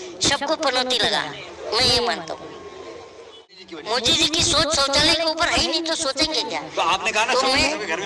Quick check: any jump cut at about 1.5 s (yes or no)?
no